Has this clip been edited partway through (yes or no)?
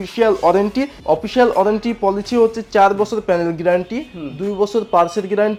no